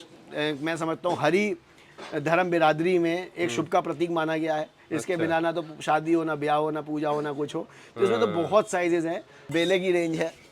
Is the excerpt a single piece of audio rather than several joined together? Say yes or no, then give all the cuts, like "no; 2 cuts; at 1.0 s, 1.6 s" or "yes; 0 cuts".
no; 1 cut; at 9.4 s